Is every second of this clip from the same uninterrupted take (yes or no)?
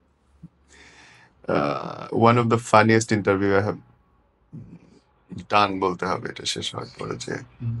yes